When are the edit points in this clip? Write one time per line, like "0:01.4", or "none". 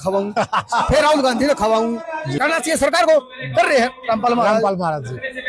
0:02.4